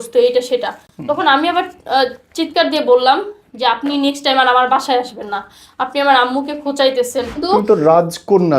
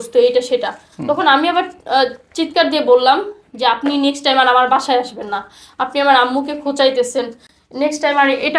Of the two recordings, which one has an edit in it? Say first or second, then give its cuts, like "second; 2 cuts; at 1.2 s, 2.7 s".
first; 1 cut; at 7.3 s